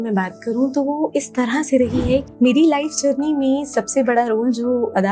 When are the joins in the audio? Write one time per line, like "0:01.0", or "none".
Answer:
0:02.3